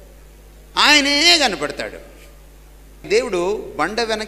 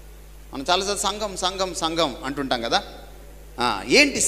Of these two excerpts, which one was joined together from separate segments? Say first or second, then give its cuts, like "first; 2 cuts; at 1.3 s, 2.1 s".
first; 1 cut; at 3.1 s